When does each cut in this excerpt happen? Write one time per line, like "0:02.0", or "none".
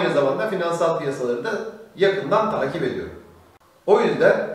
none